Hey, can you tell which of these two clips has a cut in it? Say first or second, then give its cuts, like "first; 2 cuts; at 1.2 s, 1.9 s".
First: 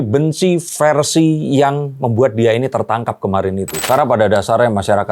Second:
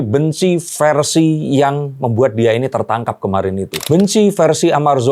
first; 1 cut; at 3.8 s